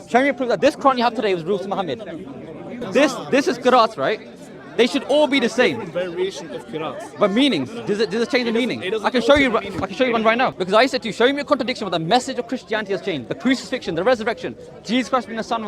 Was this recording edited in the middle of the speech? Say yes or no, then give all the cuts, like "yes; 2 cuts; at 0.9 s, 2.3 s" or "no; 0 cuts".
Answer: yes; 2 cuts; at 2.8 s, 10.6 s